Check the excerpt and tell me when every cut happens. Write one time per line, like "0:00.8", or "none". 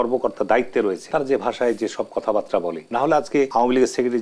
0:01.0
0:02.8
0:03.5